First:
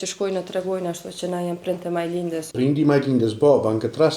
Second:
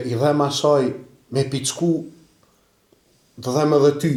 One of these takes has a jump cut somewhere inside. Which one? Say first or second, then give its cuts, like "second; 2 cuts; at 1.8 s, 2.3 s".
first; 1 cut; at 2.5 s